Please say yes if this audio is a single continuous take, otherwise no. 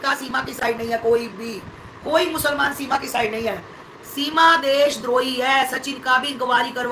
yes